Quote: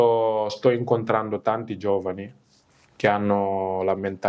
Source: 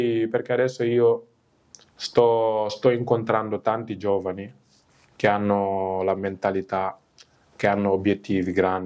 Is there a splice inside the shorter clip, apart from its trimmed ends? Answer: no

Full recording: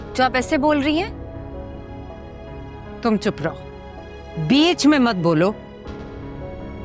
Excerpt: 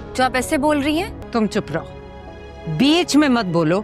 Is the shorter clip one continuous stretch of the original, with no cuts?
no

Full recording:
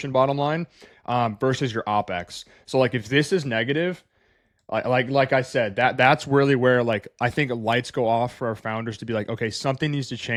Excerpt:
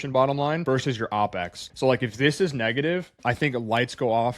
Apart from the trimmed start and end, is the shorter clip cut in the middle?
yes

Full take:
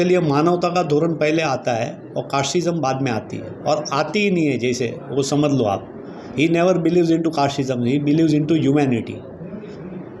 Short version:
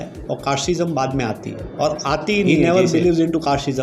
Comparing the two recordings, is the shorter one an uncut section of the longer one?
no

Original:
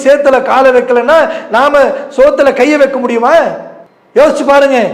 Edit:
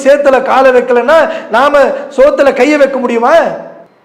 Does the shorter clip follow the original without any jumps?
yes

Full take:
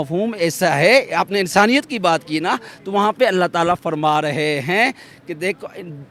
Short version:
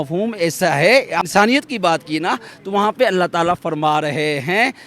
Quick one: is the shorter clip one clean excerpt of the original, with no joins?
no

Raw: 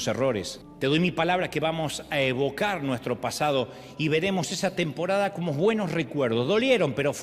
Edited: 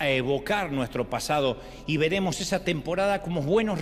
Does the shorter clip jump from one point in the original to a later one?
no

